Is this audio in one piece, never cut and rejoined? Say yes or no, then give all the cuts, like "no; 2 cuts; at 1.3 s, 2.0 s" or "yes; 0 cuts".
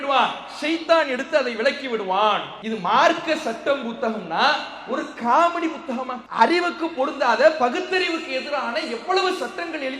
no; 2 cuts; at 2.5 s, 6.2 s